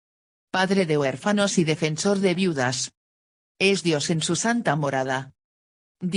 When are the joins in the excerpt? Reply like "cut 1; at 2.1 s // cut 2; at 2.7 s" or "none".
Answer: none

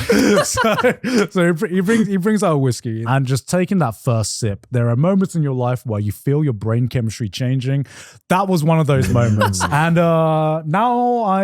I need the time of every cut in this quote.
cut 1; at 3.0 s // cut 2; at 4.6 s // cut 3; at 9.7 s

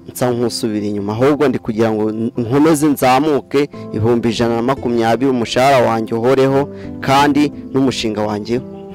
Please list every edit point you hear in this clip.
none

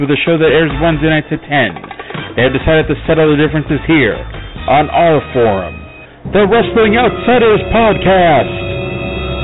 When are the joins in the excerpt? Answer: none

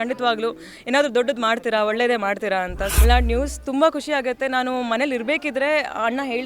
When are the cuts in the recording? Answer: cut 1; at 3.0 s

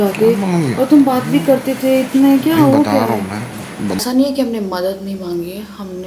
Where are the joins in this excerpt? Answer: cut 1; at 4.0 s

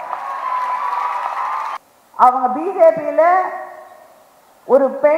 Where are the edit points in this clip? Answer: cut 1; at 1.7 s

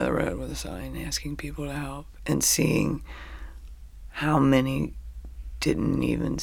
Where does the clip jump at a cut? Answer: none

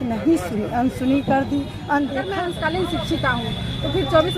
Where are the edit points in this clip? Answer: cut 1; at 2.2 s

